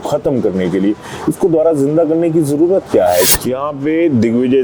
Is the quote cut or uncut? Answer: cut